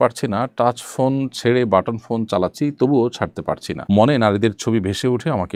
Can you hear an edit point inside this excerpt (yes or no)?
no